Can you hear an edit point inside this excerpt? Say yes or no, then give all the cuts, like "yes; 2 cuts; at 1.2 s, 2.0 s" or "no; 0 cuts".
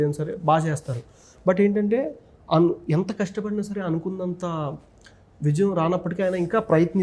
no; 0 cuts